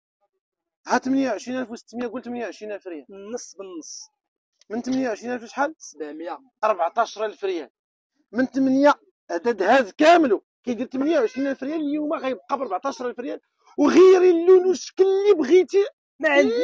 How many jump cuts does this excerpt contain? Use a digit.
0